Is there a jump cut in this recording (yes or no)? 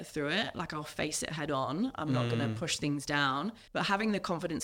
yes